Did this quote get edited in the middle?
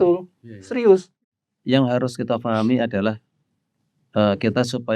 yes; 1 cut; at 1.2 s

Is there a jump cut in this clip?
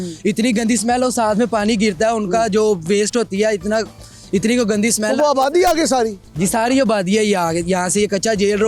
no; 0 cuts

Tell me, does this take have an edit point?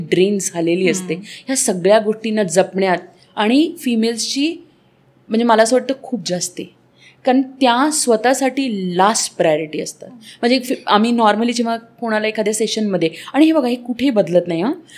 no; 0 cuts

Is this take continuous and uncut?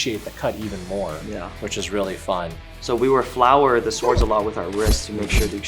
yes; 0 cuts

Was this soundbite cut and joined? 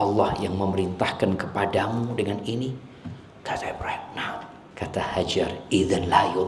yes; 1 cut; at 4.6 s

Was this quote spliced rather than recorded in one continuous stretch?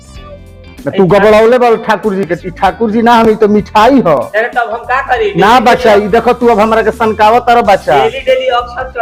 no; 0 cuts

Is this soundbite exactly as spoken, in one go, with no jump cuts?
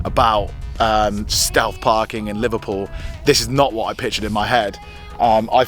yes; 0 cuts

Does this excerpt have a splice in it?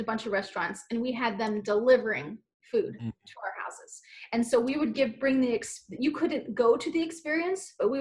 no; 0 cuts

